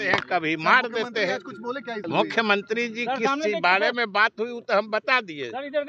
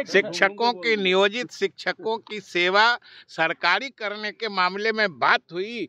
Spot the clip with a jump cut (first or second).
first